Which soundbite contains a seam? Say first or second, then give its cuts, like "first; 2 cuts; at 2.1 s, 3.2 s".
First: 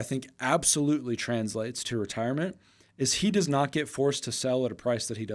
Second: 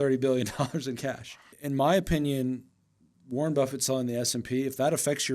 second; 1 cut; at 1.5 s